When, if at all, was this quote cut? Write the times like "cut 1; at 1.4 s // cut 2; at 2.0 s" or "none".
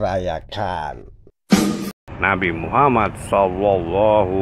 cut 1; at 1.3 s // cut 2; at 2.0 s